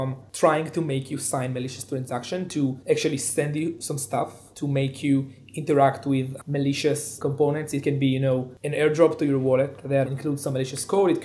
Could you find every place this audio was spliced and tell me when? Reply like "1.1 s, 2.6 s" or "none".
2.8 s, 4.4 s, 7.1 s, 10.1 s